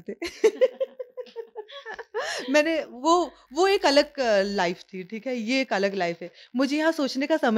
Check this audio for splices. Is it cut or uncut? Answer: uncut